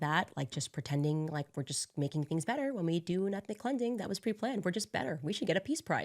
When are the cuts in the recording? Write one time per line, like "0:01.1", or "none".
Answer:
none